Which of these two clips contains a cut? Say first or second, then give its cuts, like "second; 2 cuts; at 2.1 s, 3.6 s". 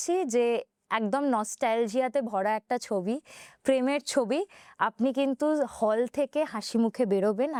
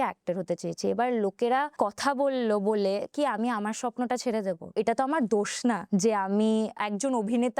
second; 4 cuts; at 1.7 s, 4.8 s, 5.8 s, 6.8 s